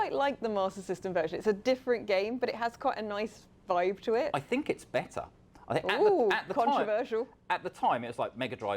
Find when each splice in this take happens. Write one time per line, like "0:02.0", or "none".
none